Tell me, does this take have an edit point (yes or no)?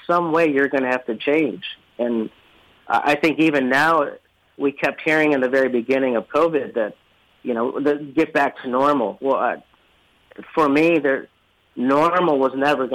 no